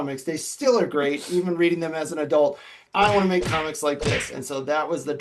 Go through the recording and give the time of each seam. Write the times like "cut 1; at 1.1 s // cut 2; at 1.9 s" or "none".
cut 1; at 2.8 s